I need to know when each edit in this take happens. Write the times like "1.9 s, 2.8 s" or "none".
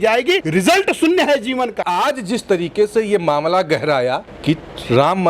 1.8 s